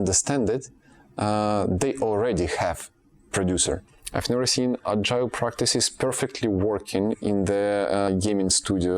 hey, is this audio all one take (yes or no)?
no